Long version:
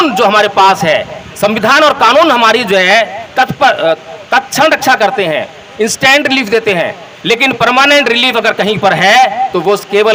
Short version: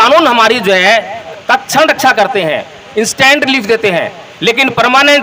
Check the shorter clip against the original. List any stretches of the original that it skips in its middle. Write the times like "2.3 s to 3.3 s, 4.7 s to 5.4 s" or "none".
3.3 s to 4.1 s